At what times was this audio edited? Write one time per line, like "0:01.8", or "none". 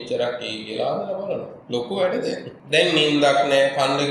0:01.5
0:02.5